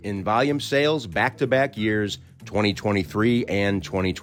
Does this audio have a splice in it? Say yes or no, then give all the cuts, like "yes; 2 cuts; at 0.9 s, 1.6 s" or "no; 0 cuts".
no; 0 cuts